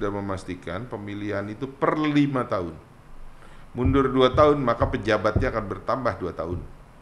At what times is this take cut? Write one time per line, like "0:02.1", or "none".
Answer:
none